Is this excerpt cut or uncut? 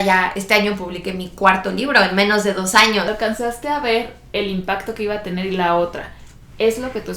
cut